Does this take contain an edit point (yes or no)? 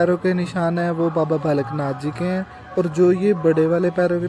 no